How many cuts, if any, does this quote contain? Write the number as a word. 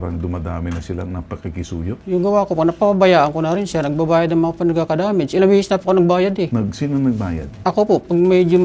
one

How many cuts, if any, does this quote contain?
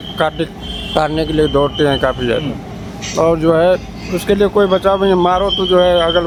zero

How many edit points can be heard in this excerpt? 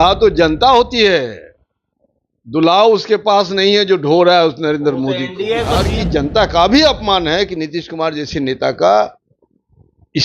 one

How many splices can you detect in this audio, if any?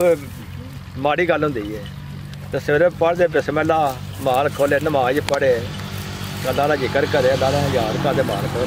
zero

